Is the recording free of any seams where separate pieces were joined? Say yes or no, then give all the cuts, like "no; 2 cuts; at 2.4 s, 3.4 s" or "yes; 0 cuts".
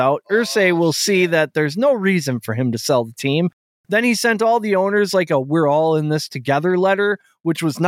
yes; 0 cuts